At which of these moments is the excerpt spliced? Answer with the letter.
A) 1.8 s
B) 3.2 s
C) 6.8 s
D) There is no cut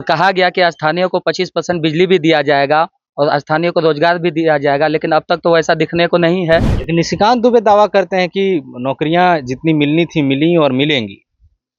C